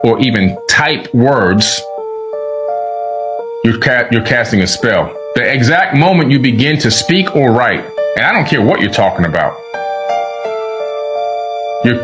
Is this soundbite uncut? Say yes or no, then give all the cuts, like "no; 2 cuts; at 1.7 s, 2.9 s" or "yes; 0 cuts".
yes; 0 cuts